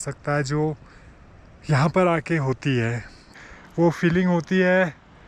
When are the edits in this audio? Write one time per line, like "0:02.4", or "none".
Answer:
0:03.3